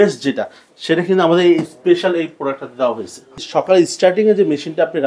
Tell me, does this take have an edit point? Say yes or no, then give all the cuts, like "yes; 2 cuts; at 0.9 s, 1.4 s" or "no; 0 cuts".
yes; 1 cut; at 3.3 s